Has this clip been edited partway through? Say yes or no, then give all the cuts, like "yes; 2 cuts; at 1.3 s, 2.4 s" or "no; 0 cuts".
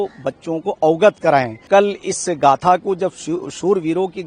yes; 1 cut; at 1.6 s